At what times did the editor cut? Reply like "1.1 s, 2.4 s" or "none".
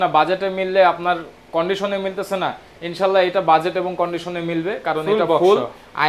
none